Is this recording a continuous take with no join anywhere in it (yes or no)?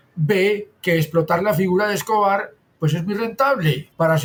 yes